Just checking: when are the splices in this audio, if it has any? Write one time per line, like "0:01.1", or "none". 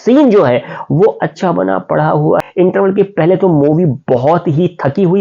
0:02.4